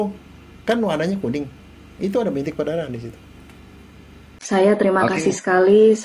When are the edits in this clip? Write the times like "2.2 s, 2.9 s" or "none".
4.5 s